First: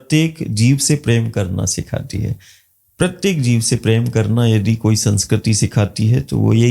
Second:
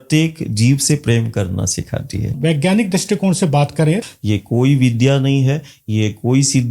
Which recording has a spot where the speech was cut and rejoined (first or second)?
second